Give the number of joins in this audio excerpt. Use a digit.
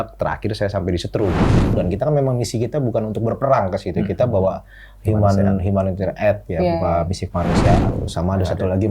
2